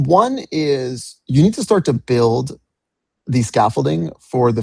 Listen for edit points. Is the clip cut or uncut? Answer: uncut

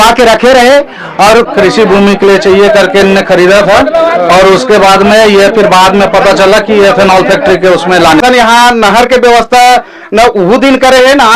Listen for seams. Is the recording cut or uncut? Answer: cut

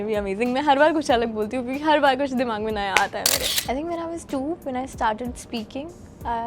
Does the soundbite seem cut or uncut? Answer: cut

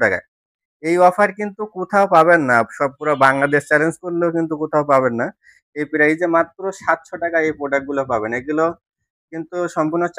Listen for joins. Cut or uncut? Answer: uncut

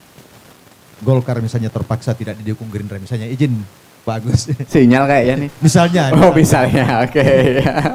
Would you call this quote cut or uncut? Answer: uncut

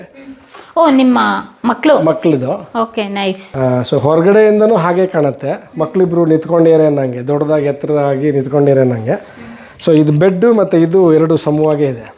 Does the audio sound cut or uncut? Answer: uncut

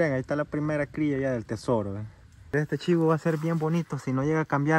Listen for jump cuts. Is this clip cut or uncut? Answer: cut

